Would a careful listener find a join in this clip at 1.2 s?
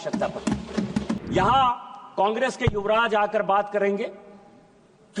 yes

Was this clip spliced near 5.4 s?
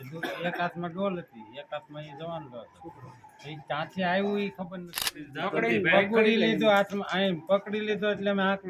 yes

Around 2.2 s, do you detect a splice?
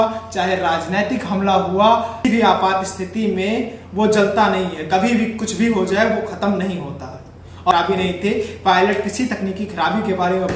yes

